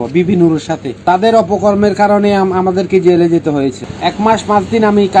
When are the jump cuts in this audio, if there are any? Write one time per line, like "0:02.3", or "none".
0:01.0
0:03.8